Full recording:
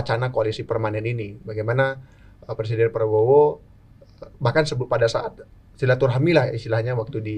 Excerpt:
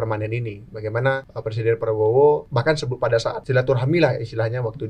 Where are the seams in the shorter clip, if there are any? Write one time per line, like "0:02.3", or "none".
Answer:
0:01.3
0:02.5
0:03.4